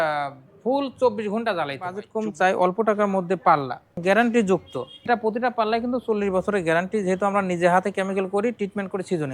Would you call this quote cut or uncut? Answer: cut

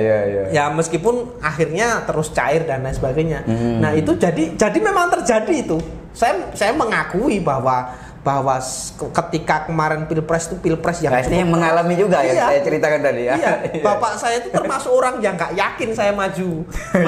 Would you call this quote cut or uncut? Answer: uncut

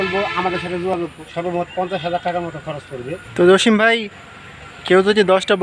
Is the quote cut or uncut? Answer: cut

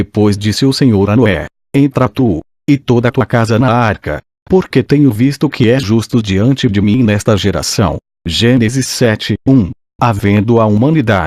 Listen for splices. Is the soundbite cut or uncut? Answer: cut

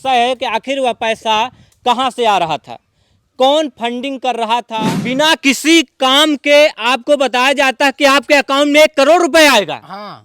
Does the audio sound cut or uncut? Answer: cut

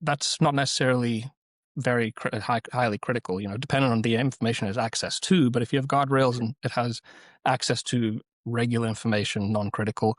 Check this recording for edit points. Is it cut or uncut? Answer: uncut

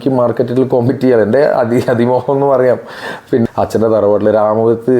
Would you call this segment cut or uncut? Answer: cut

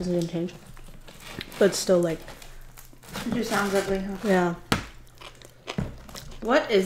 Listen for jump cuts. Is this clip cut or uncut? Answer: uncut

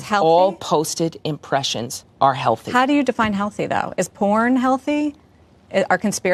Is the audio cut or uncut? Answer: uncut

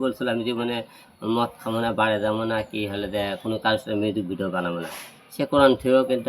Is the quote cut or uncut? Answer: uncut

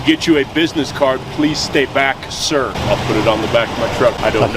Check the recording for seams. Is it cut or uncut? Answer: uncut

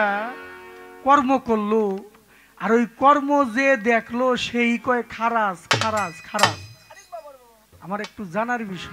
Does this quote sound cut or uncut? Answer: uncut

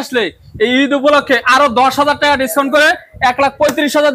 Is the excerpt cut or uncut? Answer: uncut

